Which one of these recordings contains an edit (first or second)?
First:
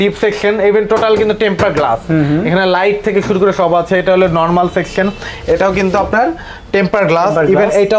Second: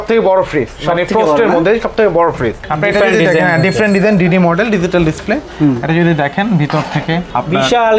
second